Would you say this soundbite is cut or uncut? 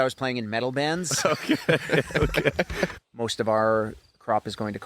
cut